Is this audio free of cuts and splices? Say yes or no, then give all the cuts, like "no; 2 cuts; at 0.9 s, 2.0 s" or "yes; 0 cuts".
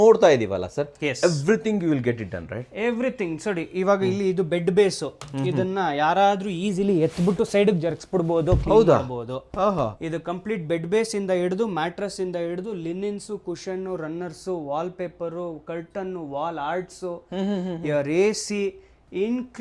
yes; 0 cuts